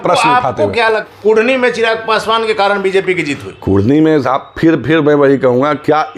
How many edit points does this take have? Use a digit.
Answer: 1